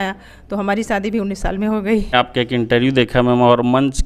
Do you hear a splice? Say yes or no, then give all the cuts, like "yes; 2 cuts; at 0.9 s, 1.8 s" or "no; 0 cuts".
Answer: yes; 1 cut; at 2.1 s